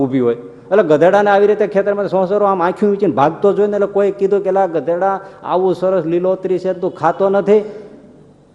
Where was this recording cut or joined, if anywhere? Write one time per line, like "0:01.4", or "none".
none